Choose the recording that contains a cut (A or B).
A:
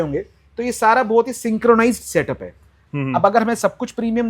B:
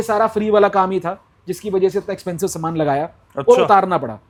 A